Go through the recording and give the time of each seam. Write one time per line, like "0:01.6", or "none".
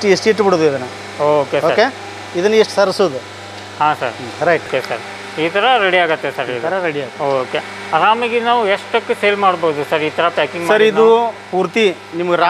0:04.7